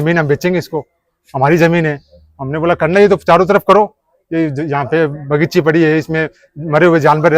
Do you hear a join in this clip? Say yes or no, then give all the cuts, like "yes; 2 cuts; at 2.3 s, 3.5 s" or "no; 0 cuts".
no; 0 cuts